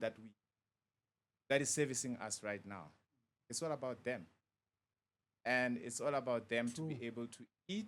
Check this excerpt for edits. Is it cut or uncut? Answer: uncut